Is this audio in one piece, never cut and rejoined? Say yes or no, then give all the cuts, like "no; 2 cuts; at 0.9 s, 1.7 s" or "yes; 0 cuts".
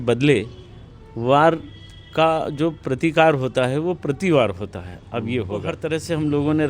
no; 1 cut; at 5.8 s